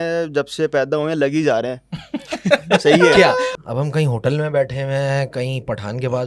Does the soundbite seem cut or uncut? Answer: cut